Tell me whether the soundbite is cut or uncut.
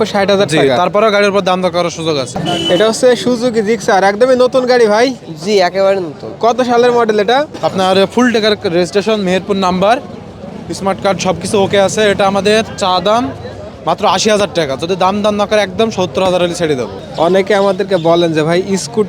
cut